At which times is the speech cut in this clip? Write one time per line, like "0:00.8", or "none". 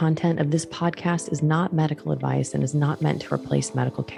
none